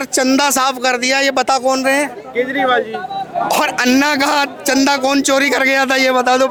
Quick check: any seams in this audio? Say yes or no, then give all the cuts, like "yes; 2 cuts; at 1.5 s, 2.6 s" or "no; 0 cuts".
no; 0 cuts